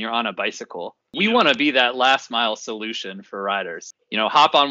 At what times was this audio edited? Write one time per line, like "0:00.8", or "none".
0:01.0